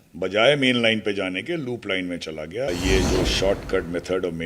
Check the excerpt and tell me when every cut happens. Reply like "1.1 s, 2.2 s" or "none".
2.7 s